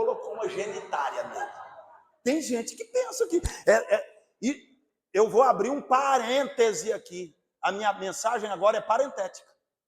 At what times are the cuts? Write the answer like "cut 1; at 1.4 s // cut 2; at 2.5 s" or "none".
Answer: none